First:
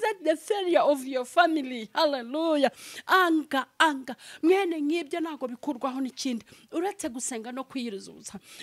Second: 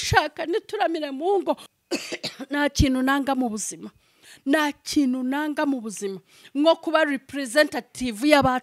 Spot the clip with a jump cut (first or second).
second